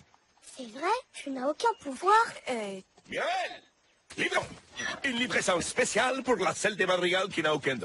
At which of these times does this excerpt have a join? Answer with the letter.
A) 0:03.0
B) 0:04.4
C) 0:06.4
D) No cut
B